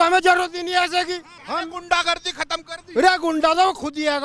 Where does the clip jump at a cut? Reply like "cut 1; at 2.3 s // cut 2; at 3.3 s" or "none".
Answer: cut 1; at 1.3 s

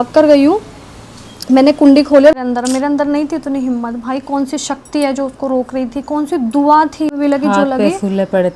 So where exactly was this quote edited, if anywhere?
cut 1; at 2.3 s // cut 2; at 7.1 s

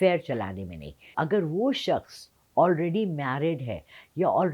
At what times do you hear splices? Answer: cut 1; at 1.1 s

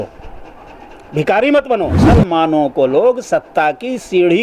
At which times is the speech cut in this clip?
cut 1; at 2.0 s

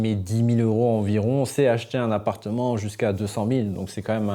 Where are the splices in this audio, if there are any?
none

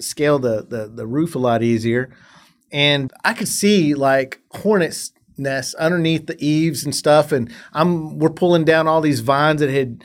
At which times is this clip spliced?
cut 1; at 3.0 s

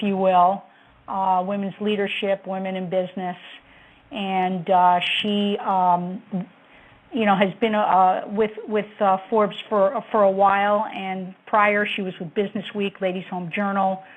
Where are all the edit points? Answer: cut 1; at 6.1 s

